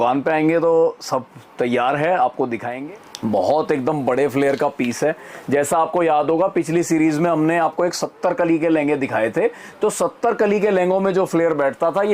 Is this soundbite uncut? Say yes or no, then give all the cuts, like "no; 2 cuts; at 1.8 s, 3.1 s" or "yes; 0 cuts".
no; 1 cut; at 2.6 s